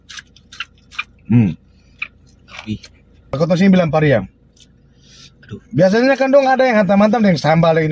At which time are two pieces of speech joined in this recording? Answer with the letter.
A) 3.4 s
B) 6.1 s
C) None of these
A